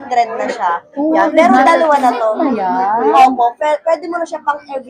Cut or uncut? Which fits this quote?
uncut